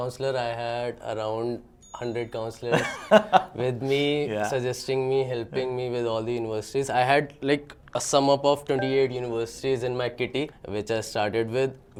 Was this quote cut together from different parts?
no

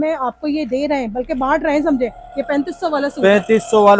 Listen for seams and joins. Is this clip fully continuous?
yes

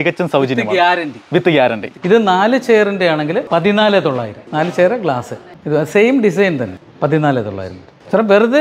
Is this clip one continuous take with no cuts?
no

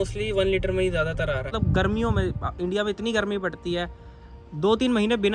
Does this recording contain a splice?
yes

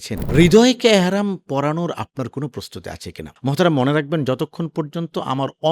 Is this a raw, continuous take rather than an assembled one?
yes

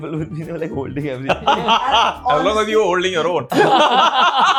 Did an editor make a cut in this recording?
no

